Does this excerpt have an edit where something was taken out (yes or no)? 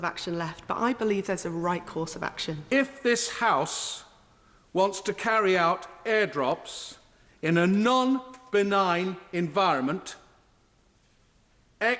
yes